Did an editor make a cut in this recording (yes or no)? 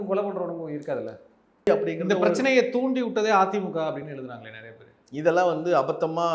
yes